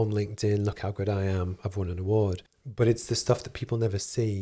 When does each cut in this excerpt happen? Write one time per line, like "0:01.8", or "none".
0:02.5